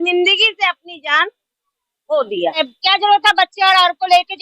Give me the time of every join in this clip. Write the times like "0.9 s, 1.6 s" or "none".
2.7 s